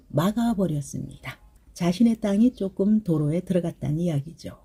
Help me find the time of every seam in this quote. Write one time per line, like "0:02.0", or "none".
none